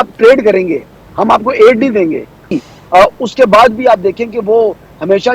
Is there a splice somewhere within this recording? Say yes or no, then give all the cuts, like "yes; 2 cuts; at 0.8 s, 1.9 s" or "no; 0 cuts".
yes; 1 cut; at 2.6 s